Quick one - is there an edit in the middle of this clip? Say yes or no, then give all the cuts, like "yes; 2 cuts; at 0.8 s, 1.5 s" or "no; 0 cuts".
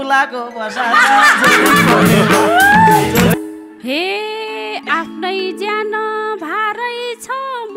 yes; 1 cut; at 3.3 s